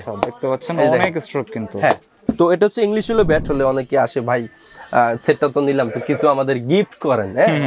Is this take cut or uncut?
cut